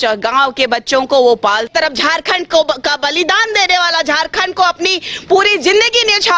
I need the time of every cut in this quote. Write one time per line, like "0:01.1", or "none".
0:01.7